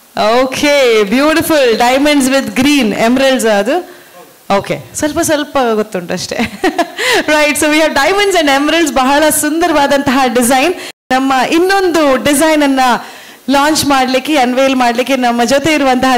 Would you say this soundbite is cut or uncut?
cut